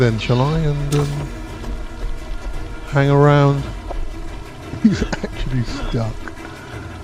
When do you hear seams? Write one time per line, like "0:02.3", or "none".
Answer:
none